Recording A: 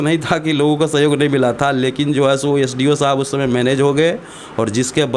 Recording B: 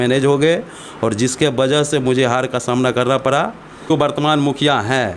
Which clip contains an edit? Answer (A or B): B